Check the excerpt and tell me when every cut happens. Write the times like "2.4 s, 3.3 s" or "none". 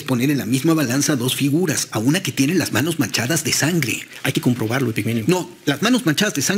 none